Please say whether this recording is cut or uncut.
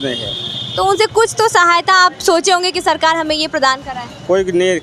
uncut